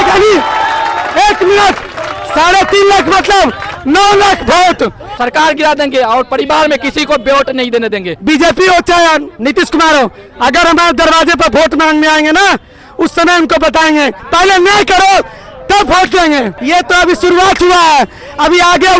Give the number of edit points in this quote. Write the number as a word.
five